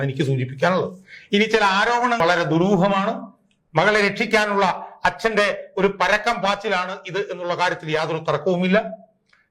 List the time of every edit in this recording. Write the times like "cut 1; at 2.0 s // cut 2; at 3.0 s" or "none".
cut 1; at 2.2 s

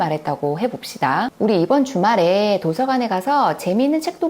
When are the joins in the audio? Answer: cut 1; at 1.3 s

